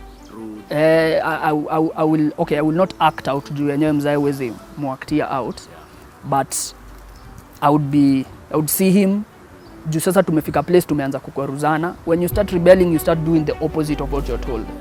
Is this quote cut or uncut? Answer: uncut